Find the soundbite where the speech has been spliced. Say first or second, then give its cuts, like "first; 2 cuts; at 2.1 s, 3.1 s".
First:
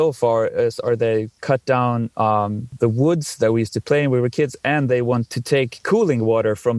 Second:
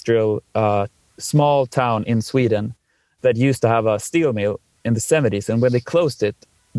first; 2 cuts; at 2.7 s, 5.3 s